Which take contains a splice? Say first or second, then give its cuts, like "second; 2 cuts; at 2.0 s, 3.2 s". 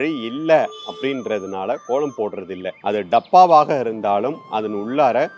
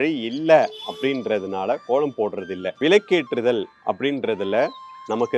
second; 1 cut; at 2.7 s